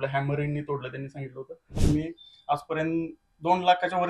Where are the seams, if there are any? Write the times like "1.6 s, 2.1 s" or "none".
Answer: 1.7 s